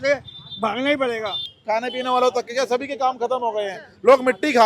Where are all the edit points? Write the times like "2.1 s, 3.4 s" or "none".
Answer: 1.5 s